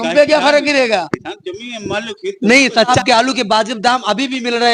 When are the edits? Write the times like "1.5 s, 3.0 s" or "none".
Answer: 2.9 s